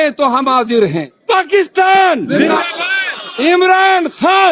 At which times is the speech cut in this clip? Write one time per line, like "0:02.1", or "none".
0:01.1